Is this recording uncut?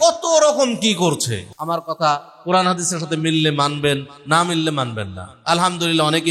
no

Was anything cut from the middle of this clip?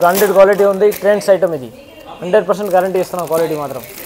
no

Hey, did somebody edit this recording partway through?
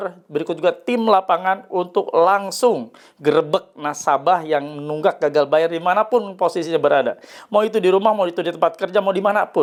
no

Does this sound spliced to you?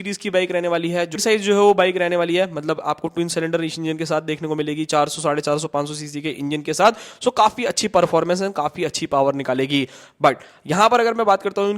yes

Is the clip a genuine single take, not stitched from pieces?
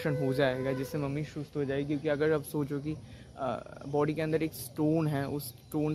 yes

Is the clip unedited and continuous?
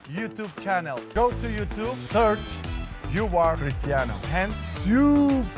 no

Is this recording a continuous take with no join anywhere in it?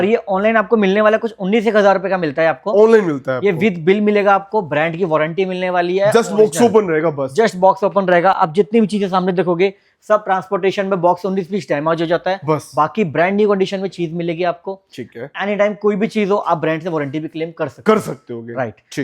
yes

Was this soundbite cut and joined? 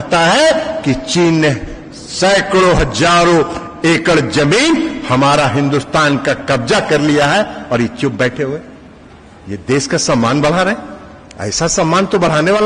no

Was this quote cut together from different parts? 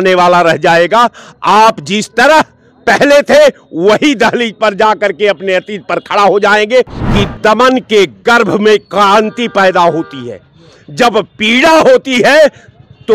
yes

